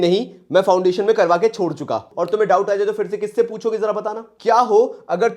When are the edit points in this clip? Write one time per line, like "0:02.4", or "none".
0:02.1
0:04.3